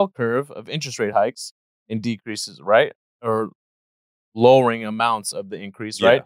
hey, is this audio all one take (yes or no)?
yes